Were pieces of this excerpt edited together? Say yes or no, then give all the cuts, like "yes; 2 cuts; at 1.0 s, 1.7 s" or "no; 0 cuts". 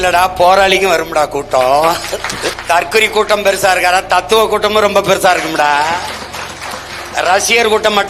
yes; 1 cut; at 2.5 s